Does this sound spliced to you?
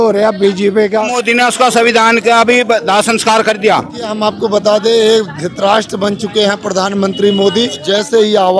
yes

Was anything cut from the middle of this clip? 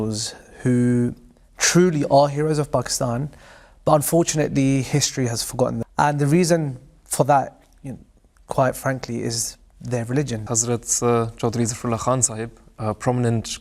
yes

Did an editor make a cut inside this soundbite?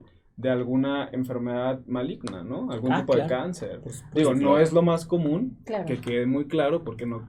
no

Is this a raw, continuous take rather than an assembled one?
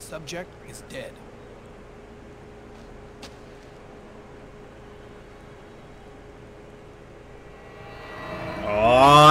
yes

